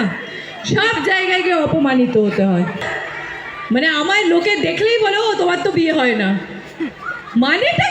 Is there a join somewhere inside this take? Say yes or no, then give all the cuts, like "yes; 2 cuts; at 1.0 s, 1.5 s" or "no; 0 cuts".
yes; 1 cut; at 2.9 s